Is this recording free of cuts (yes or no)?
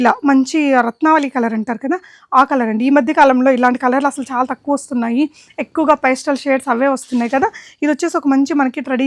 yes